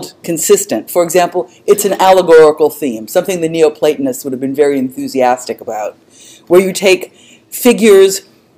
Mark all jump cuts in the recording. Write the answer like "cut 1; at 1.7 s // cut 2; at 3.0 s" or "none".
cut 1; at 7.6 s